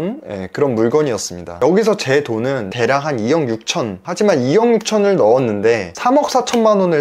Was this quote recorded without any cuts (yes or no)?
no